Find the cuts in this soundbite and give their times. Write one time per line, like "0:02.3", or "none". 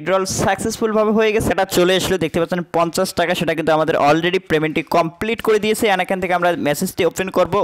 0:01.5